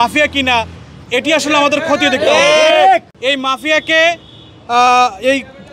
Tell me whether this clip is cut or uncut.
uncut